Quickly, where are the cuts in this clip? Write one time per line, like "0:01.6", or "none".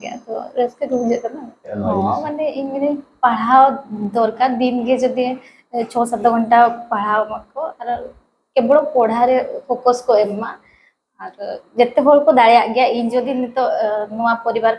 0:01.8